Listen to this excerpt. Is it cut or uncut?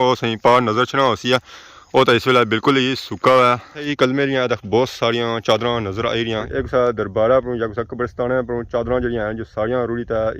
cut